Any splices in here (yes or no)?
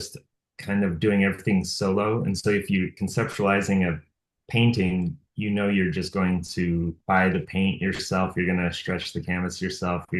yes